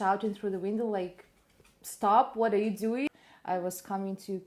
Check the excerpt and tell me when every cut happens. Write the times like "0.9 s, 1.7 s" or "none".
3.1 s